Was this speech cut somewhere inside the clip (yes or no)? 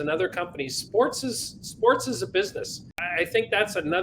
yes